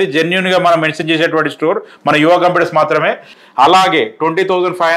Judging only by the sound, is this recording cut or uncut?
cut